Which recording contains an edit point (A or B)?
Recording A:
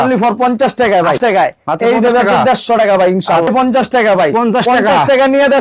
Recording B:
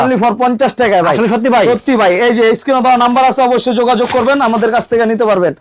A